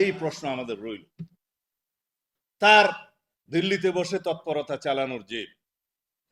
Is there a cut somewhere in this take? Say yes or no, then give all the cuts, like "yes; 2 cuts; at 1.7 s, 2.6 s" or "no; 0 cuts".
no; 0 cuts